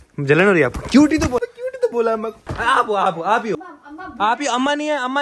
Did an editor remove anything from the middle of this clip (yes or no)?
yes